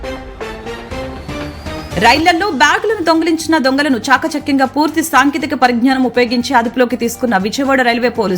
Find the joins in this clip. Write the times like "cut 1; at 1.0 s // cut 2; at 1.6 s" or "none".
cut 1; at 1.2 s